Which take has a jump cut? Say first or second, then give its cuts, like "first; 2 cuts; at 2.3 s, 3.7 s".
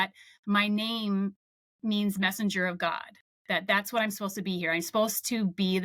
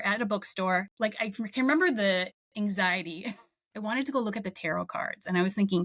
second; 2 cuts; at 0.9 s, 3.6 s